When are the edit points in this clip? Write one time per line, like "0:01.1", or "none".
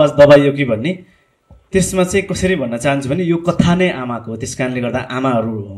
none

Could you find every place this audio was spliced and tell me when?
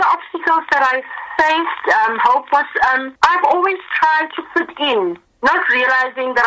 none

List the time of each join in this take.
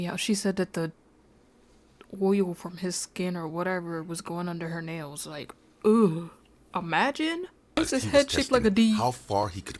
0:07.8

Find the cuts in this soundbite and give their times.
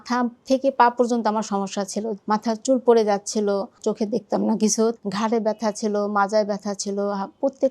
0:02.1
0:03.8
0:04.9

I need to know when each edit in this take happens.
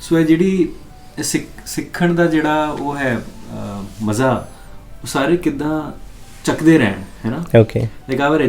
none

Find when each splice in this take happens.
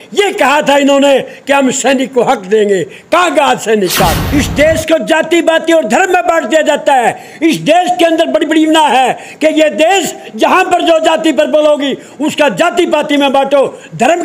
0:04.2

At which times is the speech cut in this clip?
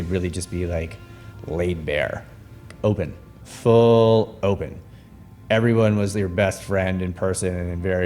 0:02.7

